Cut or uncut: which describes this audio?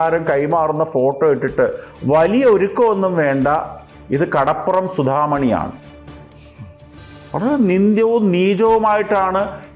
uncut